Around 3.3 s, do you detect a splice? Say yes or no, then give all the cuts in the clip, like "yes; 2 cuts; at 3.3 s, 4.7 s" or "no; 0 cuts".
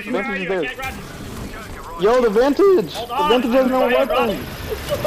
no; 0 cuts